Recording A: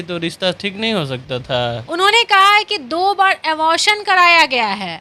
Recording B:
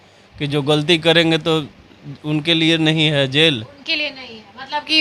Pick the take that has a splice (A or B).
A